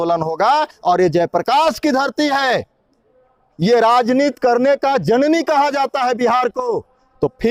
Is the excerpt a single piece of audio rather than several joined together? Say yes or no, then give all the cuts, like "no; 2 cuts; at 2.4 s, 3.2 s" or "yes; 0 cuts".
yes; 0 cuts